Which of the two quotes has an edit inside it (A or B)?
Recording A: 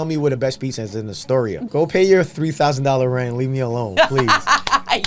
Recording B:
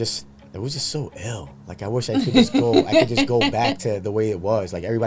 A